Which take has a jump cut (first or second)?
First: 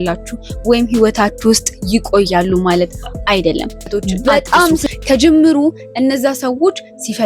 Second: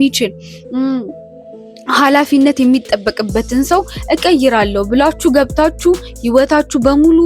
first